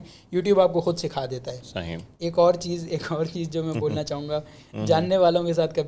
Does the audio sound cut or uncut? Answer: cut